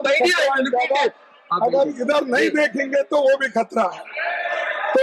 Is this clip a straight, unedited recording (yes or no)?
yes